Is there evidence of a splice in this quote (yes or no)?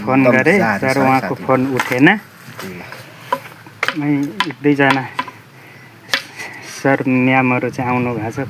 no